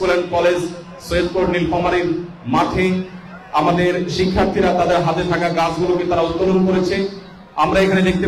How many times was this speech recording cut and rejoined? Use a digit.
0